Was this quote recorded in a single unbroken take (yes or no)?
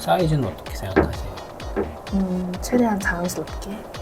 yes